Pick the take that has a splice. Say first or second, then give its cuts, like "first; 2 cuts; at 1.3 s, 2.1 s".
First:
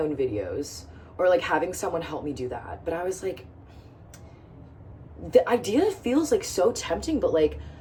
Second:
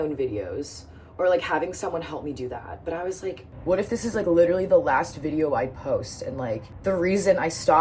second; 2 cuts; at 3.5 s, 6.7 s